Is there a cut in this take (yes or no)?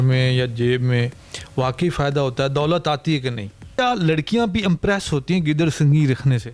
yes